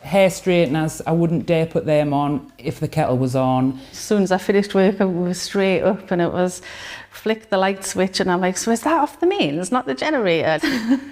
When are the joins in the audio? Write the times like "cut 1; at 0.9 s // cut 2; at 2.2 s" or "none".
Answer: cut 1; at 4.0 s

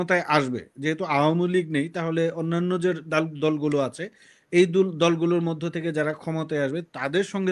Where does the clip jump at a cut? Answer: none

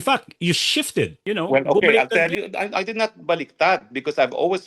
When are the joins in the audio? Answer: cut 1; at 1.2 s // cut 2; at 2.3 s

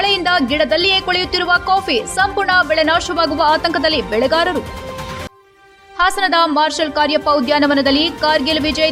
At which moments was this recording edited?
none

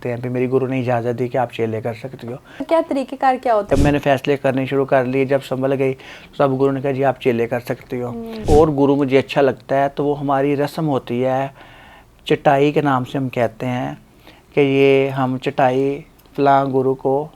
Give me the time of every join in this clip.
cut 1; at 2.6 s // cut 2; at 3.7 s // cut 3; at 8.4 s

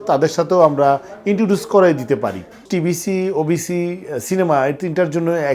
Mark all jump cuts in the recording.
cut 1; at 2.7 s

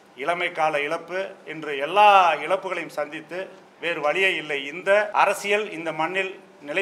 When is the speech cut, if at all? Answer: cut 1; at 5.1 s

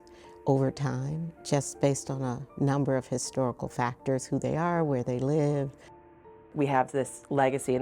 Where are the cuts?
cut 1; at 6.4 s

